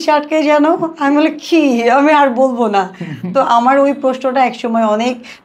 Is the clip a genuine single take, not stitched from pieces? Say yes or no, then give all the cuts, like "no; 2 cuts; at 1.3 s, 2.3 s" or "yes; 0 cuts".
yes; 0 cuts